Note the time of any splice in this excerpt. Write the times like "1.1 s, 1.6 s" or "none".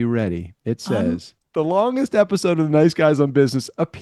1.4 s